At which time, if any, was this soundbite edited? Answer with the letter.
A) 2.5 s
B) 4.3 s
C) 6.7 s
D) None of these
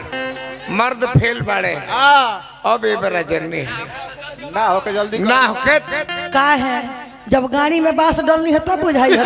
D